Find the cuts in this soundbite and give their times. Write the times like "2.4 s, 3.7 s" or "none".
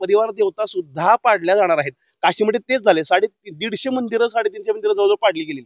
none